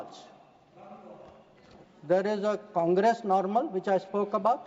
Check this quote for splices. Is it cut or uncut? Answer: uncut